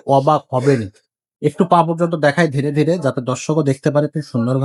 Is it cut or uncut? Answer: uncut